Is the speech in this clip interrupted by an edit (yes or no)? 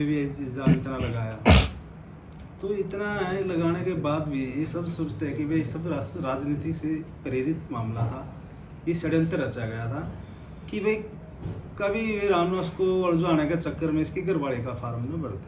no